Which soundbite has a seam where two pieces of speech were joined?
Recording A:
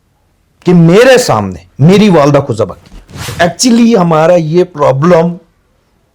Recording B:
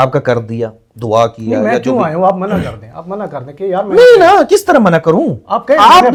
A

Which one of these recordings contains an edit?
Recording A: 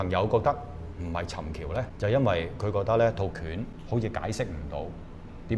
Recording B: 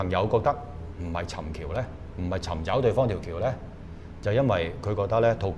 A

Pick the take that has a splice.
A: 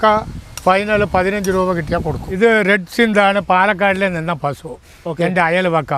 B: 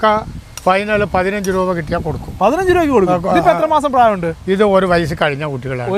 A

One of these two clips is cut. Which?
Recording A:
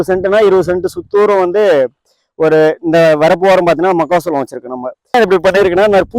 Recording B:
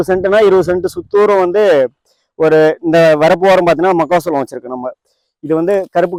A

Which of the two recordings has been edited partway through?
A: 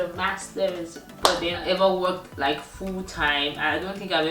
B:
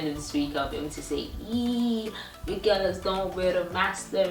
A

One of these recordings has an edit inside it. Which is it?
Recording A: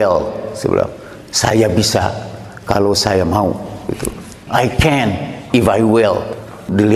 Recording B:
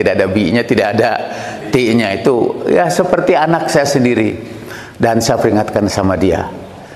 B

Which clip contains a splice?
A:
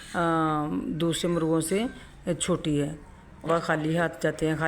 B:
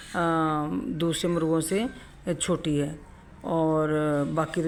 A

